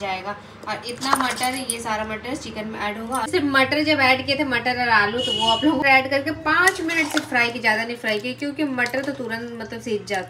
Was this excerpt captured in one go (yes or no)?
no